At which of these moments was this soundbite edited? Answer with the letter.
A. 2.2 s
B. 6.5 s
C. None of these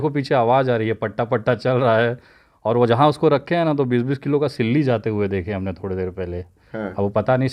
C